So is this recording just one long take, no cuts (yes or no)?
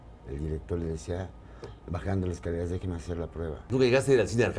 no